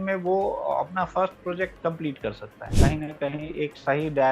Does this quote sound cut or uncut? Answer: cut